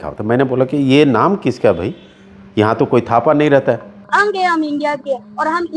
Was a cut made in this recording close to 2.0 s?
no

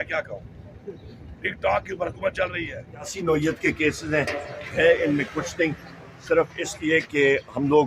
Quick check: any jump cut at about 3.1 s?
yes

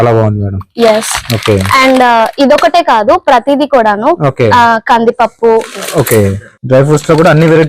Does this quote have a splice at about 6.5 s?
yes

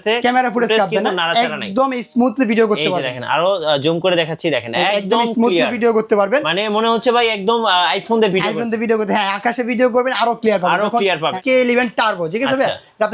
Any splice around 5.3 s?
no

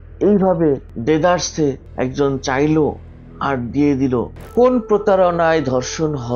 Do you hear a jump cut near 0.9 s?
yes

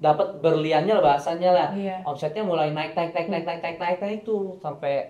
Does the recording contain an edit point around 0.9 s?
no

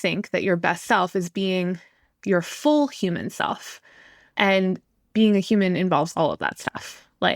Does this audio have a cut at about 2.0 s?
no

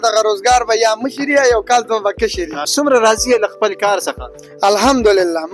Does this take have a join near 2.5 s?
no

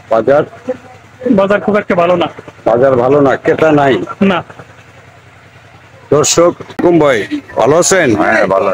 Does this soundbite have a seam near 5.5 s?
no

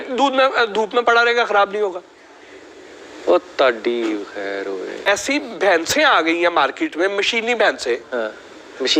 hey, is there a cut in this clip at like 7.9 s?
no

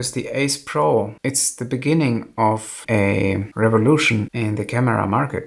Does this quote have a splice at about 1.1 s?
yes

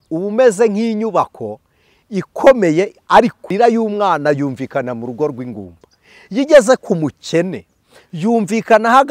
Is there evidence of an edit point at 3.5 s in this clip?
yes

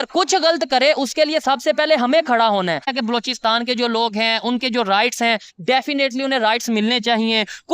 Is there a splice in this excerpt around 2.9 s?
yes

